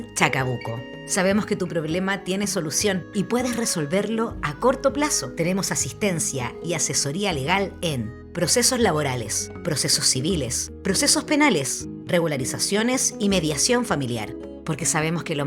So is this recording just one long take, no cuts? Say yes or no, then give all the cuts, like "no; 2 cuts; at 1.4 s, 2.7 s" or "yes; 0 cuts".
no; 1 cut; at 4.4 s